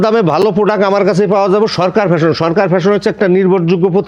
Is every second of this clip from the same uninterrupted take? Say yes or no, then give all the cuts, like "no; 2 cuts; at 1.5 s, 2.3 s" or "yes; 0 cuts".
yes; 0 cuts